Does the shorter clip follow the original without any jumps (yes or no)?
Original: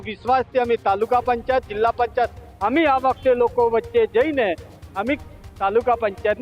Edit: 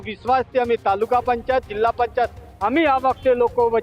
yes